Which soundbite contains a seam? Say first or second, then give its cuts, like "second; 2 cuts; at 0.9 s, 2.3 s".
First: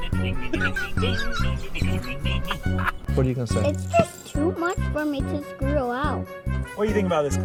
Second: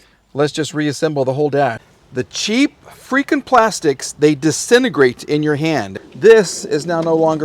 second; 2 cuts; at 1.9 s, 6.0 s